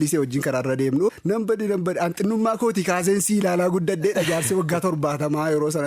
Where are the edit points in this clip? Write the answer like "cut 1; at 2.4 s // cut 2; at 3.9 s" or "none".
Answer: cut 1; at 1.1 s